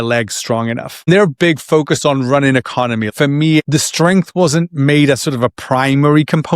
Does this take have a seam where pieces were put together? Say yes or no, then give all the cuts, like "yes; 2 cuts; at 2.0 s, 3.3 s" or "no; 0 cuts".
yes; 2 cuts; at 0.9 s, 3.3 s